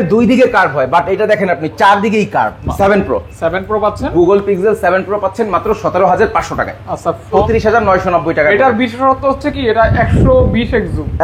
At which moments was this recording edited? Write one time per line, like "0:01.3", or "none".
0:02.6
0:07.4